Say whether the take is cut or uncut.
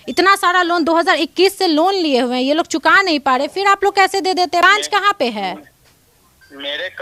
uncut